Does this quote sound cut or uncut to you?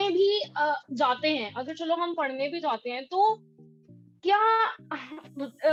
uncut